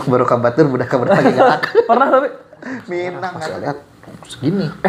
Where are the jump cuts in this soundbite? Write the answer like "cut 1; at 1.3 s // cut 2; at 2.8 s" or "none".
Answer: cut 1; at 3.3 s